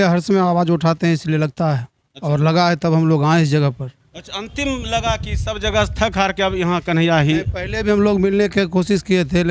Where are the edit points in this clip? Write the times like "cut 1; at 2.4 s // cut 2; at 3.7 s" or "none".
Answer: none

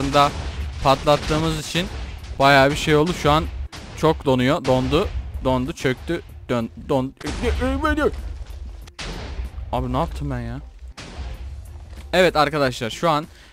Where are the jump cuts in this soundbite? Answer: none

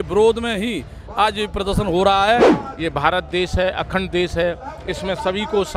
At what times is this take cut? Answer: cut 1; at 2.6 s

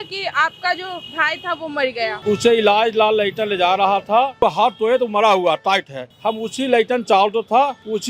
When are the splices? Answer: cut 1; at 2.2 s // cut 2; at 4.4 s

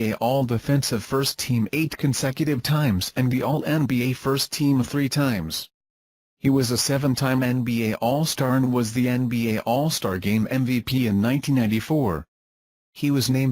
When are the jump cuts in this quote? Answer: cut 1; at 0.9 s

